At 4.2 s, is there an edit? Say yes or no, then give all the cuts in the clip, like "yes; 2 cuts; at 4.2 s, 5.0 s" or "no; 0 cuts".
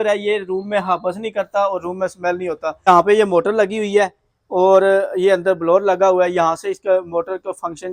no; 1 cut; at 2.9 s